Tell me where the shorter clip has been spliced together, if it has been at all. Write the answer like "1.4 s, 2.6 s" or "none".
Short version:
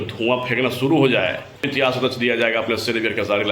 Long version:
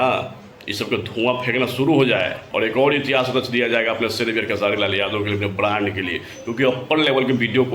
1.6 s